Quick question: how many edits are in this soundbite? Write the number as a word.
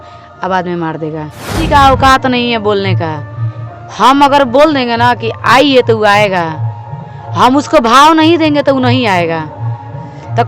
one